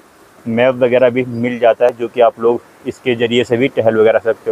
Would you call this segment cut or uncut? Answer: uncut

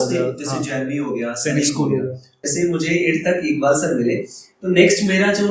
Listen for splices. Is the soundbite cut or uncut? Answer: cut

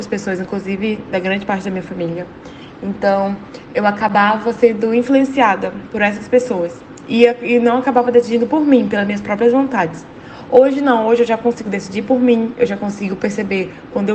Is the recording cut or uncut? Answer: uncut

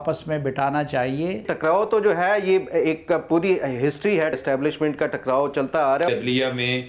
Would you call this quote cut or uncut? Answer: cut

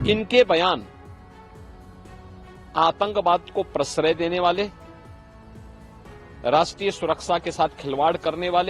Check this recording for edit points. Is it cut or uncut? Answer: cut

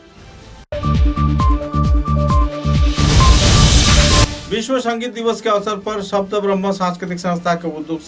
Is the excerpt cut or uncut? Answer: cut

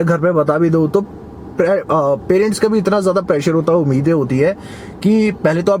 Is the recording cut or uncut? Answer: uncut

